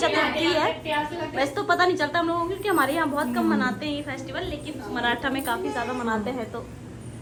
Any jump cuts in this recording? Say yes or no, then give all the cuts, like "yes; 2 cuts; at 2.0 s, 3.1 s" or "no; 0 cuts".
no; 0 cuts